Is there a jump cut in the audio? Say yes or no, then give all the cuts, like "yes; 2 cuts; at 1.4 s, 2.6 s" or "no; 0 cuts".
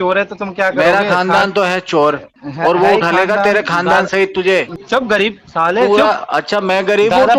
yes; 1 cut; at 4.7 s